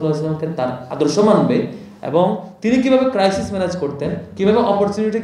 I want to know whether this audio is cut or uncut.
uncut